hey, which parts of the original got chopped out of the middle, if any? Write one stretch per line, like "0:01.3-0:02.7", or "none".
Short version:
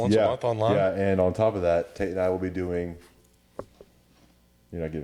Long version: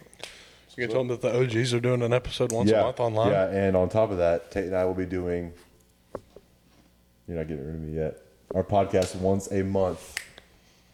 none